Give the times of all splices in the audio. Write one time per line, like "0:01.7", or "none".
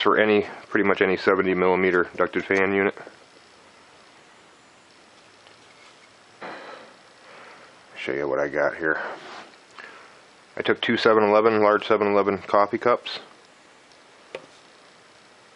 none

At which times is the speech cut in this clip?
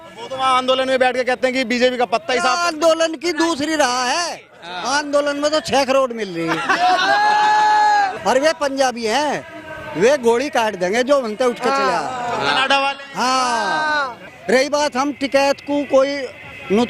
0:08.2
0:14.3

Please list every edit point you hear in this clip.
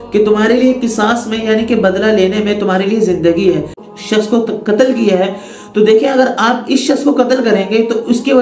0:03.7

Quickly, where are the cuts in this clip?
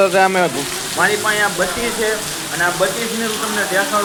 none

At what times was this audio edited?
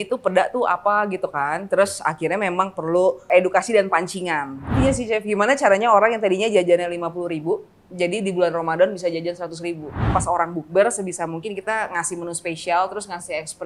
0:03.3
0:04.7
0:10.1

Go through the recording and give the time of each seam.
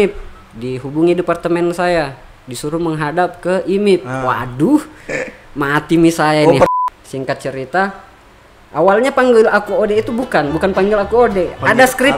0:06.7

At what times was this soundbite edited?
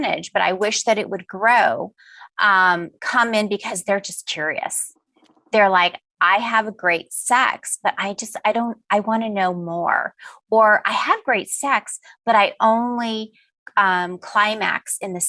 none

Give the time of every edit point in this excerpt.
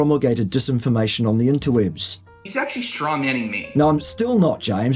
0:02.2

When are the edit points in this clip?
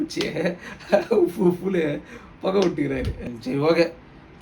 0:03.2

